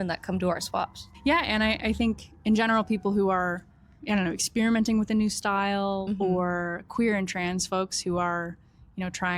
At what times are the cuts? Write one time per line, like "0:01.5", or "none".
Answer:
0:01.0
0:03.9